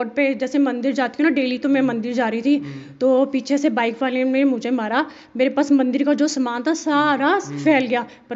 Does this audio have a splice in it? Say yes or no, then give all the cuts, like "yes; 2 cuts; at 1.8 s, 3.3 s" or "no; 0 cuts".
no; 0 cuts